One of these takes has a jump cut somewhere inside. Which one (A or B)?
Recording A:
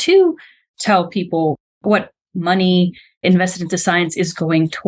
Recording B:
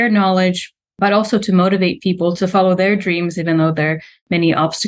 A